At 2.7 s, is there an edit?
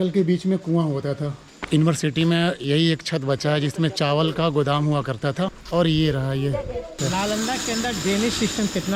no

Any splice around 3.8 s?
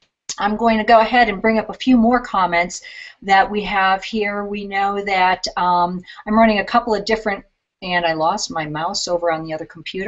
no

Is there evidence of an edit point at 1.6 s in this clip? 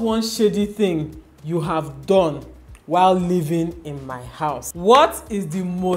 no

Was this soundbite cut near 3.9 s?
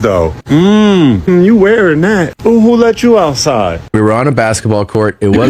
yes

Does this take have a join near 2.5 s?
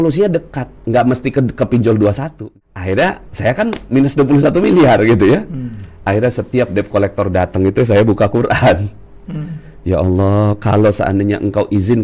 yes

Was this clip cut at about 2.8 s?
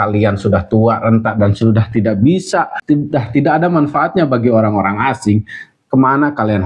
yes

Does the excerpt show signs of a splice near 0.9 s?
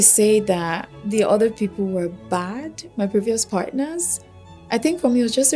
yes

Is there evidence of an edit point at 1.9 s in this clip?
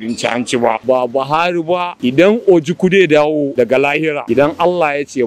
yes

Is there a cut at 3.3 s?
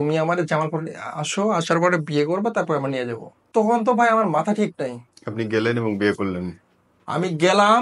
yes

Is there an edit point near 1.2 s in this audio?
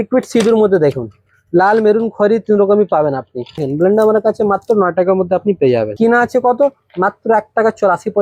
no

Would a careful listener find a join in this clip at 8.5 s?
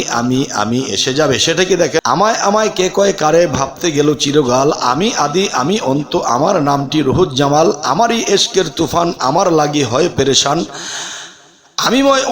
no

